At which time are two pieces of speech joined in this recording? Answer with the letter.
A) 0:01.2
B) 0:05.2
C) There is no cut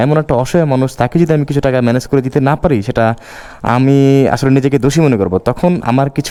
C